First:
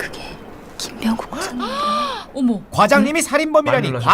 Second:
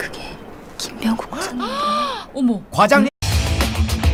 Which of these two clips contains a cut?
first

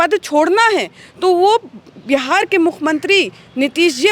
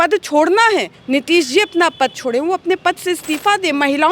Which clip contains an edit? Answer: second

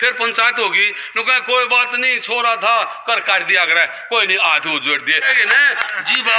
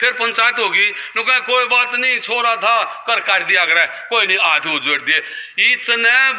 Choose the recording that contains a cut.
first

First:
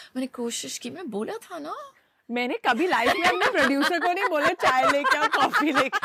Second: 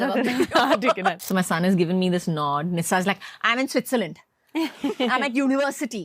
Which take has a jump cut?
second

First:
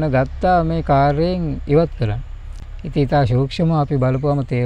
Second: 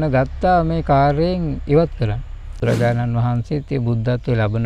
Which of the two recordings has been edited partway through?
second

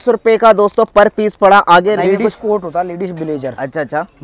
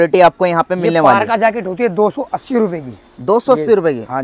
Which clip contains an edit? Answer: first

